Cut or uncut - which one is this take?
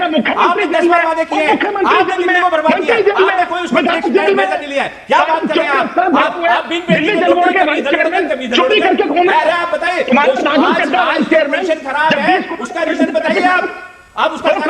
uncut